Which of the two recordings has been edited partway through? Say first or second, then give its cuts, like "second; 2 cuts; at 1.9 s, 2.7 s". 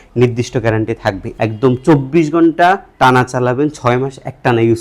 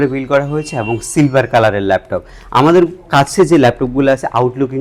first; 1 cut; at 1.3 s